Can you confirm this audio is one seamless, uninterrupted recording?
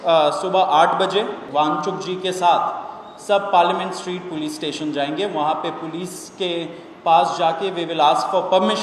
no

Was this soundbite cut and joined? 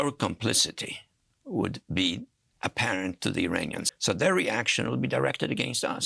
yes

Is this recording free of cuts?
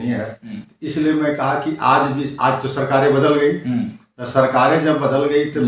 yes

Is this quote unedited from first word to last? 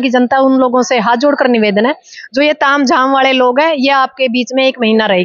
yes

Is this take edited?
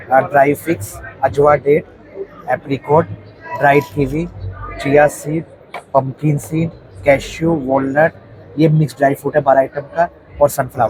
no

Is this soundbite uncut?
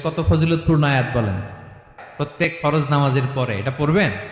no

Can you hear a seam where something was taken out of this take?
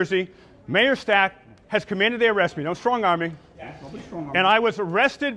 no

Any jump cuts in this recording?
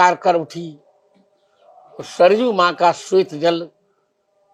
no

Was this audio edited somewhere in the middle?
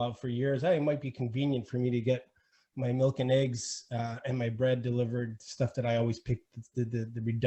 no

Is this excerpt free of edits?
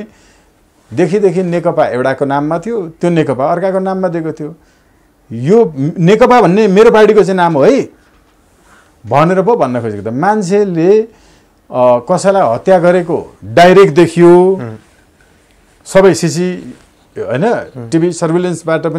yes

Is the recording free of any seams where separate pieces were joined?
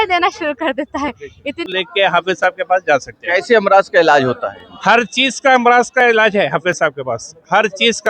no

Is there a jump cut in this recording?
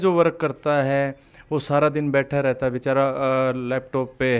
no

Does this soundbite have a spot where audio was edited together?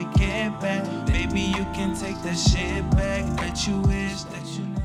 no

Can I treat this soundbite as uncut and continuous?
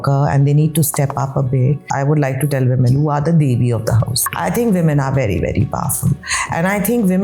no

